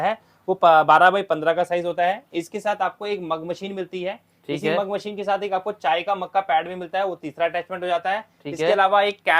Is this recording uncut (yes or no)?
yes